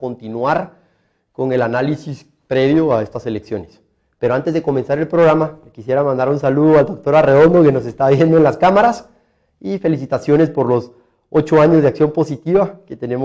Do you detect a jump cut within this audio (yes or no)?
no